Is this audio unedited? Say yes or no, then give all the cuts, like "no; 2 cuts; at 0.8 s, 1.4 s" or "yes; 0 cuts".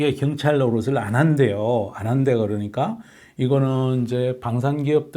yes; 0 cuts